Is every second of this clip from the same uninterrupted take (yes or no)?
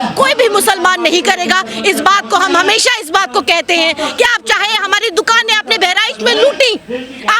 yes